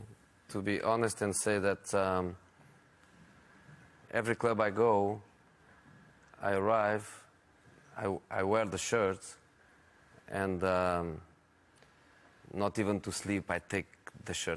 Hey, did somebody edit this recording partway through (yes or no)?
yes